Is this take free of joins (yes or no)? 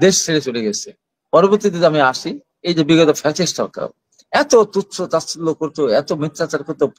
yes